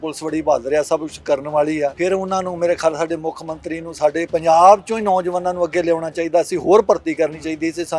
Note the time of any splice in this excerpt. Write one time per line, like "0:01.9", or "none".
0:02.0
0:04.3